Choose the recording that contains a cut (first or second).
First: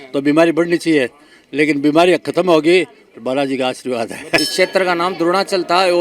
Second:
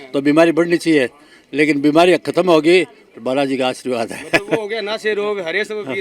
first